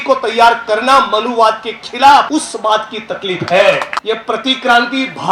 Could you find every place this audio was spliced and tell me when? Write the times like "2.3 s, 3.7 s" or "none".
2.3 s, 3.9 s